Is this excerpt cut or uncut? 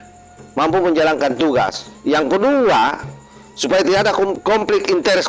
cut